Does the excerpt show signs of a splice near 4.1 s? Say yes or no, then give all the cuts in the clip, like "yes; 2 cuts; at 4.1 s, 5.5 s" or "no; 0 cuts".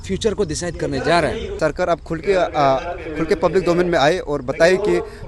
no; 1 cut; at 1.5 s